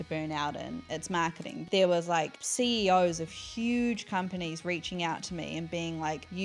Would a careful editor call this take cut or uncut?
cut